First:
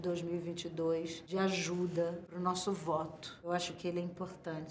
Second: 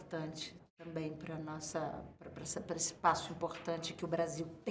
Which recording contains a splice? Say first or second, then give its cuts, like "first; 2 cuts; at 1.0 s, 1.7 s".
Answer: first; 3 cuts; at 1.2 s, 2.3 s, 3.3 s